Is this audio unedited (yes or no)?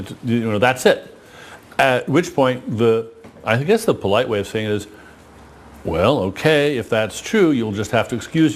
yes